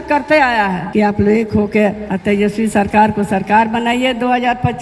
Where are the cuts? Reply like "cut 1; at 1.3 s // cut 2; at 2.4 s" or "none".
cut 1; at 0.8 s // cut 2; at 2.1 s

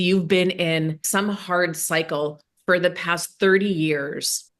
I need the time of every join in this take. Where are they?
cut 1; at 1.0 s

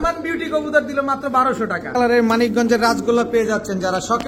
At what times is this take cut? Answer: cut 1; at 1.9 s

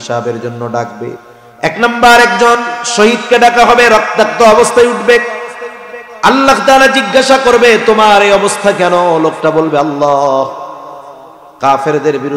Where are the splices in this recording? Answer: cut 1; at 1.2 s

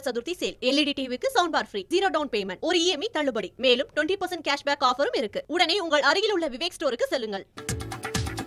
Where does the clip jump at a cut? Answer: cut 1; at 7.5 s

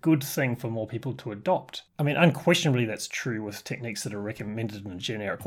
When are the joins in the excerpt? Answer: cut 1; at 1.8 s

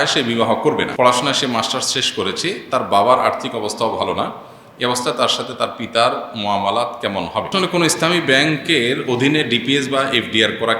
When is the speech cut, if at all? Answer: cut 1; at 0.9 s // cut 2; at 7.5 s

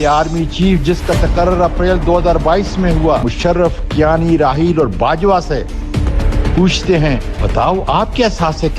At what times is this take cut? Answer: cut 1; at 3.3 s // cut 2; at 7.3 s

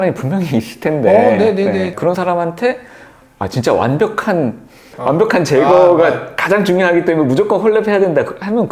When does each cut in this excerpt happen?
cut 1; at 1.9 s

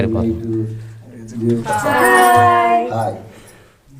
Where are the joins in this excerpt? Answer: cut 1; at 1.7 s

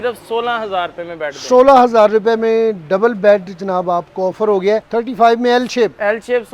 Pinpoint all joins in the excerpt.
cut 1; at 4.9 s

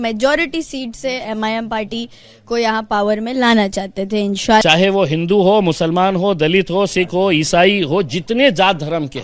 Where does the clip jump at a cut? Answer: cut 1; at 4.6 s

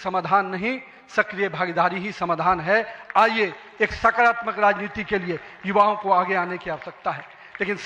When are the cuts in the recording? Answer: none

